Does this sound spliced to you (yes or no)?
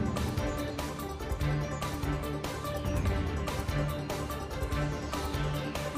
no